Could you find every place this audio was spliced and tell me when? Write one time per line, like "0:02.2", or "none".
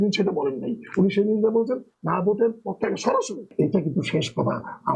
0:03.5